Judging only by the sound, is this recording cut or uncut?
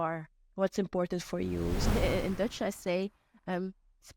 cut